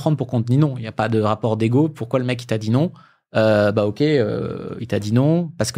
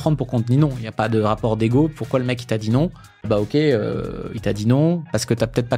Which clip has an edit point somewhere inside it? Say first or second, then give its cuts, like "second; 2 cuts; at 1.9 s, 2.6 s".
second; 1 cut; at 3.3 s